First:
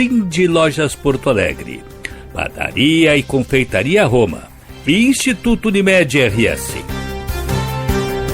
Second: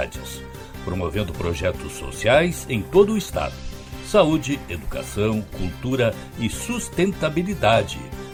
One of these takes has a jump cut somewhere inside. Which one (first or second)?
first